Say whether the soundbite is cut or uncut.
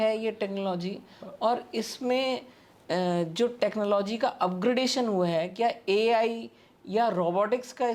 uncut